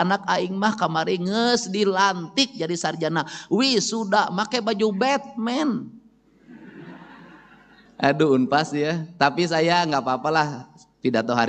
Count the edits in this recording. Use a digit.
1